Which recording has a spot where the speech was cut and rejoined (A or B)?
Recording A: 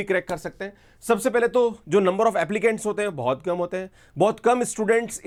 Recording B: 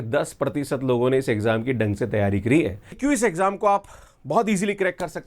B